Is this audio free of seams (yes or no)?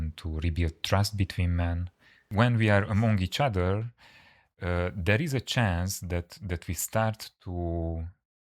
no